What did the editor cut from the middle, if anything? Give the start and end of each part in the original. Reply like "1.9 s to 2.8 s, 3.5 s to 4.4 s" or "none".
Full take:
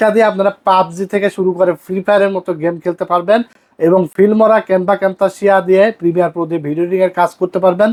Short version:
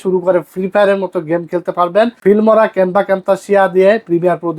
3.5 s to 4.1 s